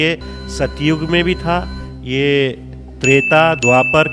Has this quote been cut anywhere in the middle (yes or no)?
no